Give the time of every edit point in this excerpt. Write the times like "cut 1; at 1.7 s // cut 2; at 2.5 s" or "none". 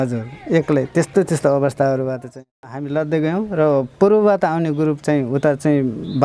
cut 1; at 2.8 s